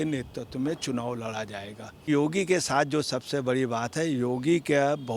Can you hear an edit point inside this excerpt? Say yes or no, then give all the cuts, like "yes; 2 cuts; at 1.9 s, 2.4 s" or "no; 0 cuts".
yes; 1 cut; at 2.1 s